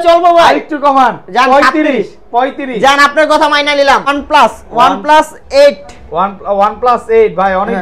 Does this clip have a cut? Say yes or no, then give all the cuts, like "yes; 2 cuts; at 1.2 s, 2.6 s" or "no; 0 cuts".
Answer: yes; 1 cut; at 4.1 s